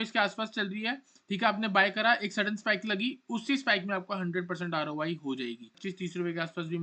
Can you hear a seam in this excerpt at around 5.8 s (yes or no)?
yes